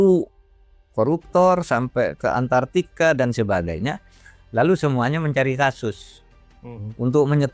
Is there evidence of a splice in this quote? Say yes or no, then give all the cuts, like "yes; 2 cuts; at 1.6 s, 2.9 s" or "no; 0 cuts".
no; 0 cuts